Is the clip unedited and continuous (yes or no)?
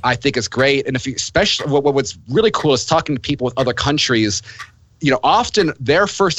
yes